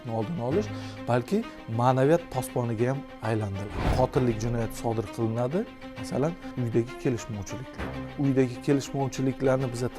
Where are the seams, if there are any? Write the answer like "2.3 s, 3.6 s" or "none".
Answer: 3.9 s, 6.5 s, 8.1 s